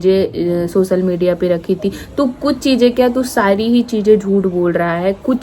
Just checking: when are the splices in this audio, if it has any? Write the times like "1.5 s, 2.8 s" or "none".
none